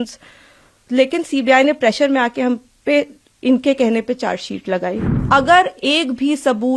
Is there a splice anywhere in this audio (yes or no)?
yes